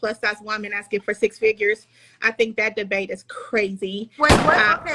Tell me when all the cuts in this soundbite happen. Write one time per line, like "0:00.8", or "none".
0:04.0